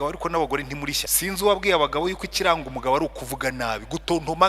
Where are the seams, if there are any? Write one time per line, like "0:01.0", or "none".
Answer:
0:01.1